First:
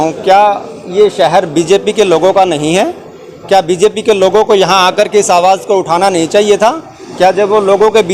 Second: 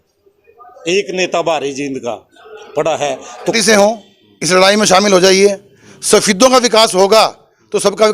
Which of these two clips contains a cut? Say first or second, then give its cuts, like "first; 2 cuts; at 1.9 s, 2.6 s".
second; 1 cut; at 3.5 s